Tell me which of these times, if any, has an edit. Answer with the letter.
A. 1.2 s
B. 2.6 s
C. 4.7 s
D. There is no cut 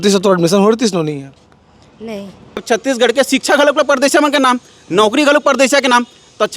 B